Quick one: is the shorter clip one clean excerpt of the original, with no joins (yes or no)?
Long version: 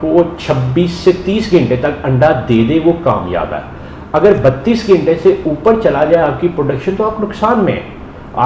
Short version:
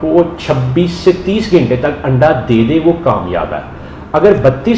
yes